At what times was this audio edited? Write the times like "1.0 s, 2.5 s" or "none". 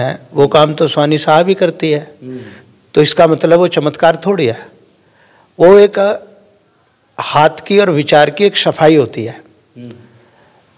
none